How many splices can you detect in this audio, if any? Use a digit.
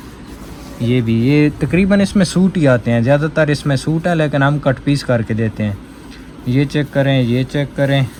0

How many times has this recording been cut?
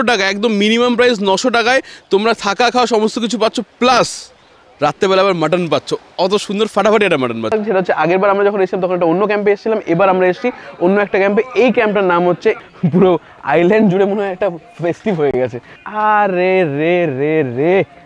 3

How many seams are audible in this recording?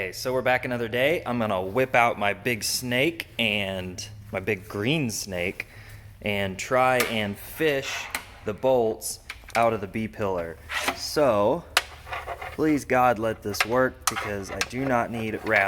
0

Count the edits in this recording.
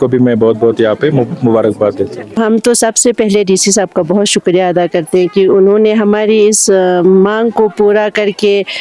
1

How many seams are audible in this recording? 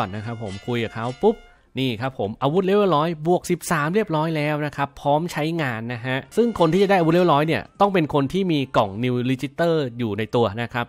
0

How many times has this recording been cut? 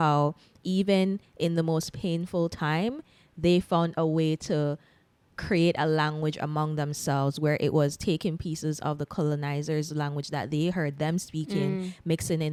0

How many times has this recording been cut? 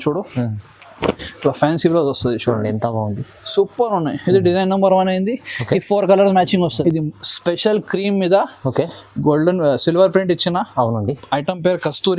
1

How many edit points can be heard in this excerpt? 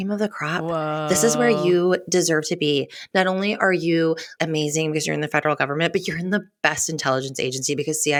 0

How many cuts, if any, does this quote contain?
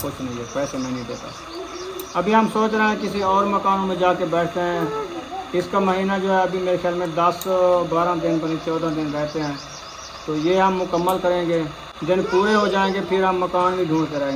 0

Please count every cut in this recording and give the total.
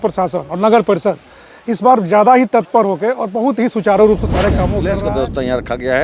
1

